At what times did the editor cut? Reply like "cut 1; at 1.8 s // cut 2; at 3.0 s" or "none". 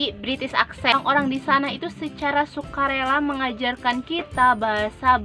cut 1; at 1.0 s